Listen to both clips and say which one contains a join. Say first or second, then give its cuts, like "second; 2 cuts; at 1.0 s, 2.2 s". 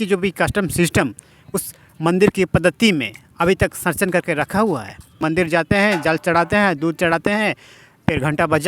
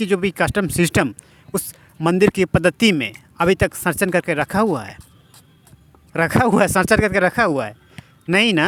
first; 1 cut; at 5.1 s